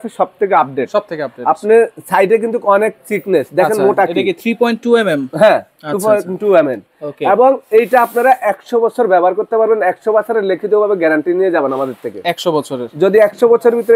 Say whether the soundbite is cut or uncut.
uncut